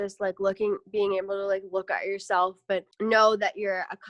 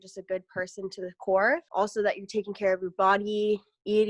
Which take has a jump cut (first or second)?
second